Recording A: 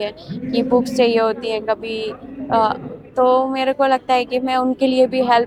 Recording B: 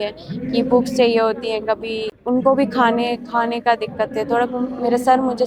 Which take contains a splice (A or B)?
B